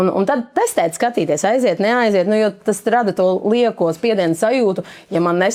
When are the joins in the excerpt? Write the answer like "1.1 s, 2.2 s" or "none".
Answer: none

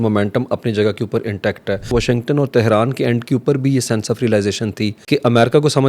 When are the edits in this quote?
1.9 s, 5.0 s

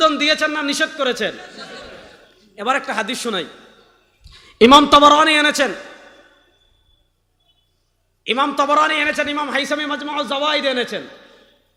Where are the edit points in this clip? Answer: none

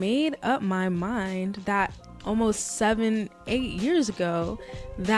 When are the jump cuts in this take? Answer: none

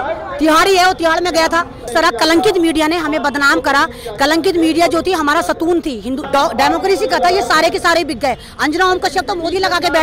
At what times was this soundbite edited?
1.9 s, 6.2 s

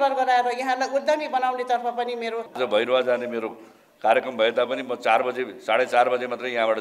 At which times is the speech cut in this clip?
2.5 s

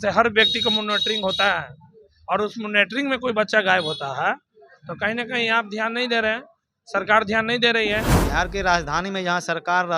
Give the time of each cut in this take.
8.2 s

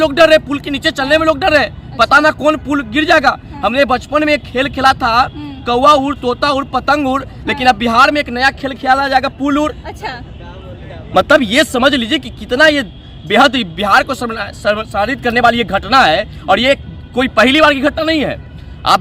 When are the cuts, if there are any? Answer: none

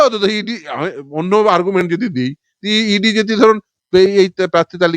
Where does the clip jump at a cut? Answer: none

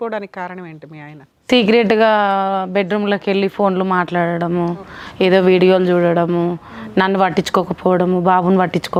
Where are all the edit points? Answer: none

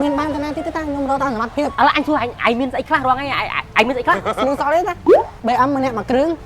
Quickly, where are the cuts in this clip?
1.7 s, 4.3 s, 5.3 s

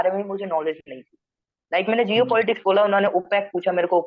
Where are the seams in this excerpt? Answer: none

